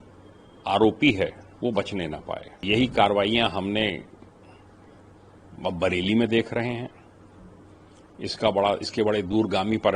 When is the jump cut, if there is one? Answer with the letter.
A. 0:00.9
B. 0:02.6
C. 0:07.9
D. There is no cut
B